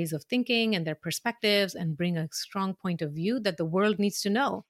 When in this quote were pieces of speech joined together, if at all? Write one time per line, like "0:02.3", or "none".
none